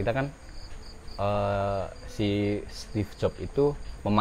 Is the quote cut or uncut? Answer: uncut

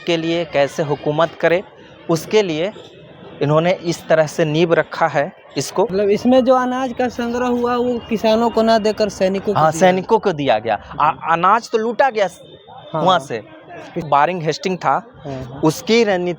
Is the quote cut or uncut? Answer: cut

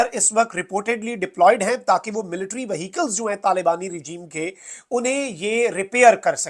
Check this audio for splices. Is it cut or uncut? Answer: uncut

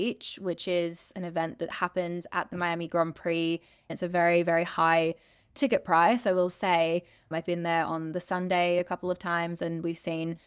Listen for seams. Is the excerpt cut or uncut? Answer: cut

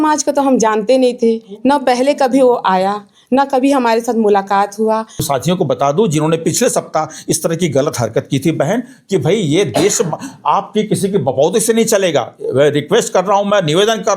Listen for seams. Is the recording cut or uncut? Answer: cut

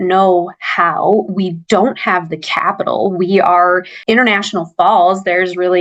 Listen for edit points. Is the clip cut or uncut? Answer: uncut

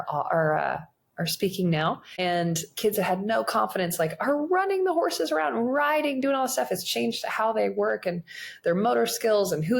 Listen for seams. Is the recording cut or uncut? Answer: cut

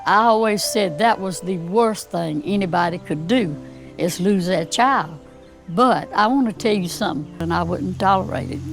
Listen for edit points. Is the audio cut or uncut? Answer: cut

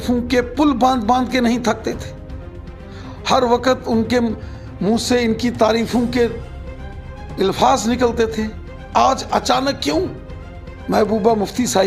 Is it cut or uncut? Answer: uncut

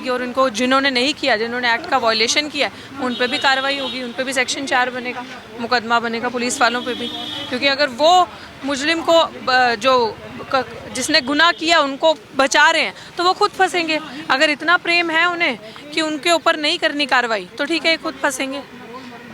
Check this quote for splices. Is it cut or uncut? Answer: uncut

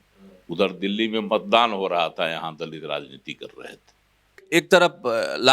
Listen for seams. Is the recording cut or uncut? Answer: cut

